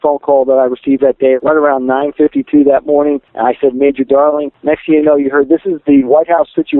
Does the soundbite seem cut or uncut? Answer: cut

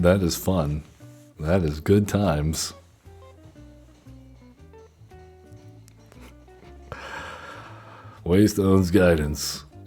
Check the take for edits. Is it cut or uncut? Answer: uncut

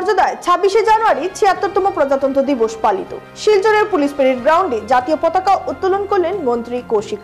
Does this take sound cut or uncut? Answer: uncut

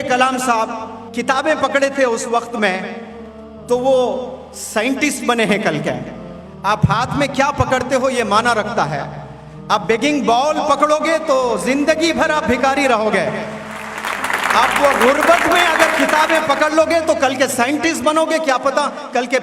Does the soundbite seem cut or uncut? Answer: uncut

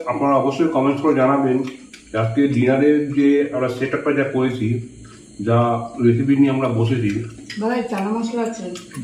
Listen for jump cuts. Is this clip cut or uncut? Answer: uncut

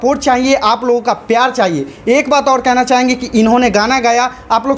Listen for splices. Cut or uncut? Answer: uncut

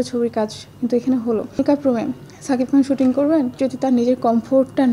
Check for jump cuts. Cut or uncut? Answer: cut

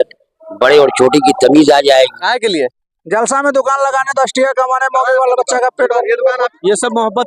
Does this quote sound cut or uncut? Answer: cut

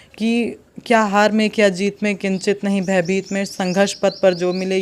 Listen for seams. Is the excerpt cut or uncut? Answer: uncut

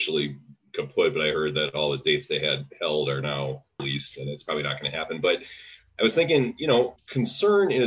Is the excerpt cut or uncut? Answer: cut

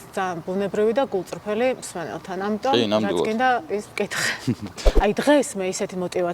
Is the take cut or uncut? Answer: cut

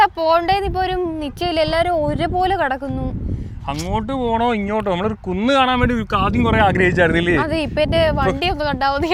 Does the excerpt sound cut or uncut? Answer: uncut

